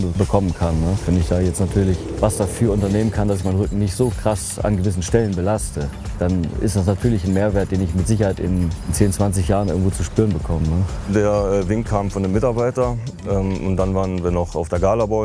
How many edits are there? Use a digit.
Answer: 0